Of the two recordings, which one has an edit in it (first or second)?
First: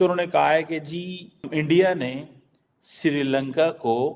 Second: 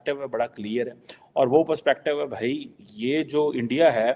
first